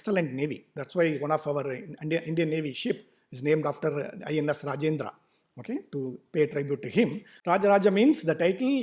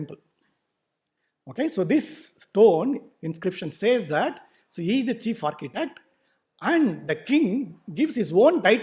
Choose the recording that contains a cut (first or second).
first